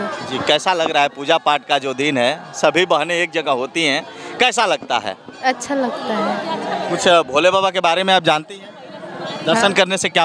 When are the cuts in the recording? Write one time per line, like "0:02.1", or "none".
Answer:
none